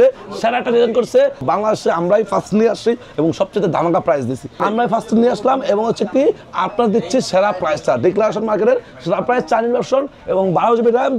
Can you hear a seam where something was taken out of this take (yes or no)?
yes